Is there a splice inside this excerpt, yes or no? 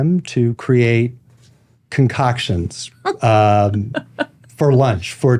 no